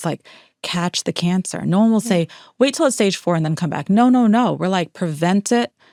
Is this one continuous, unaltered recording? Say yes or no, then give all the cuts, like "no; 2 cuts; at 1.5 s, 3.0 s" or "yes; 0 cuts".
yes; 0 cuts